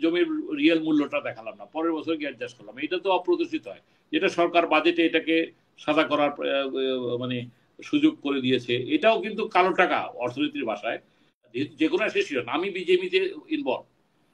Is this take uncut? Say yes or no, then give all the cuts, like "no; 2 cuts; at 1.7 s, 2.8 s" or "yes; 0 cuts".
no; 1 cut; at 11.4 s